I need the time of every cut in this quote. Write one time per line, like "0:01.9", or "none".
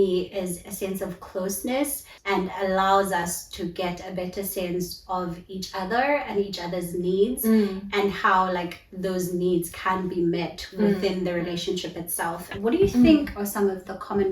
0:02.3
0:12.5